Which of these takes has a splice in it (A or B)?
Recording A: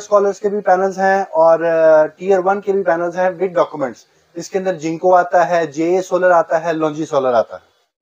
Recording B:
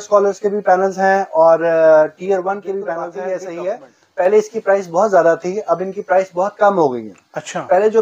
B